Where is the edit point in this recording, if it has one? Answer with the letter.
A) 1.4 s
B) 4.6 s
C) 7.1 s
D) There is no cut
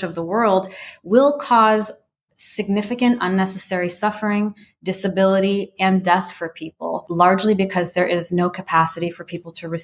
C